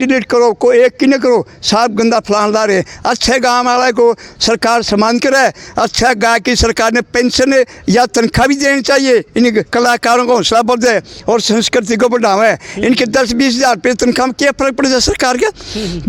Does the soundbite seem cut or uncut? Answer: uncut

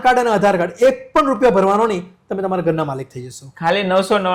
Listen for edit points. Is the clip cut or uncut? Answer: uncut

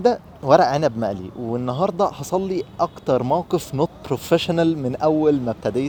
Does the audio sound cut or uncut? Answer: uncut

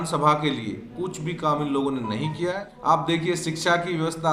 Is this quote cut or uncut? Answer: cut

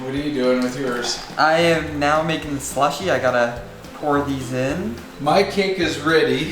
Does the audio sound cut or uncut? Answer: cut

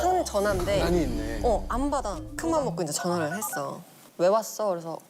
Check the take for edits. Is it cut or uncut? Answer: cut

